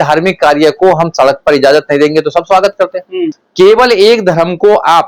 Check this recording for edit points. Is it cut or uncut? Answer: cut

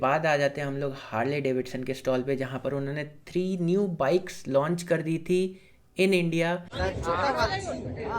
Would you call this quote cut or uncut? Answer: cut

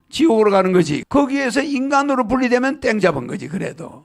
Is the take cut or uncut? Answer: cut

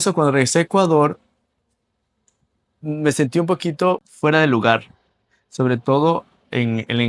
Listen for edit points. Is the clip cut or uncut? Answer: uncut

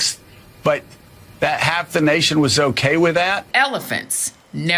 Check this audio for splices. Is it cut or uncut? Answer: cut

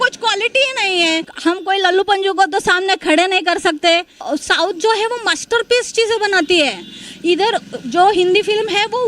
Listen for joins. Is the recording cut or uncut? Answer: cut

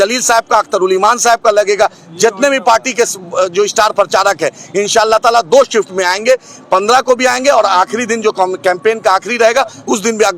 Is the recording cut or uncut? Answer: uncut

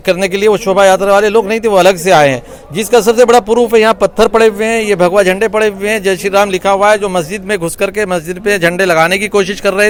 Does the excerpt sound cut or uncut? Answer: uncut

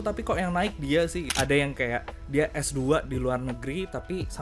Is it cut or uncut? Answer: cut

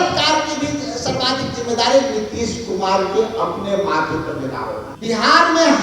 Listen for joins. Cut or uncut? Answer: cut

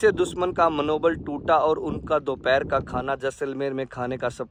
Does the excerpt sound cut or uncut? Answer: uncut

